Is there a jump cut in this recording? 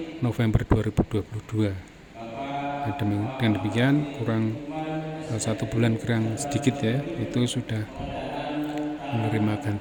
no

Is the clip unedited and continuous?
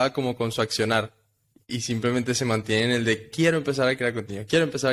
yes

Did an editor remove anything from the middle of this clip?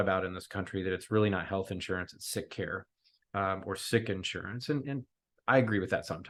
no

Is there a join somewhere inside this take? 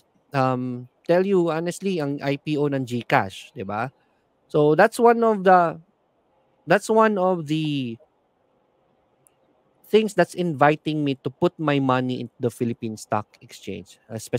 no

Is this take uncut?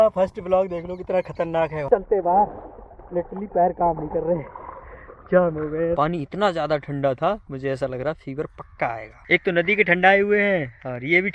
no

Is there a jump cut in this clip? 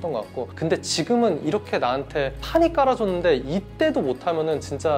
no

